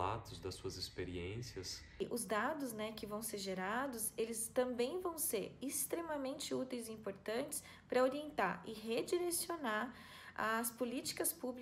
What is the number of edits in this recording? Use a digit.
1